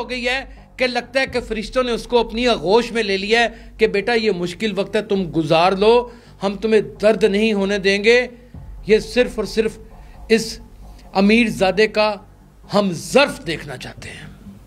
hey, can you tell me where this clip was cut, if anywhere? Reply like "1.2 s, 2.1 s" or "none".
none